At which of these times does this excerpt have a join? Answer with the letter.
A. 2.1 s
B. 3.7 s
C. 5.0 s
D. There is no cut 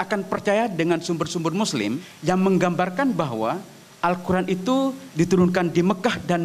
A